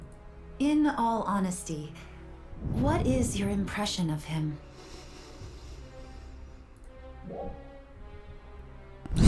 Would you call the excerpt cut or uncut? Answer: uncut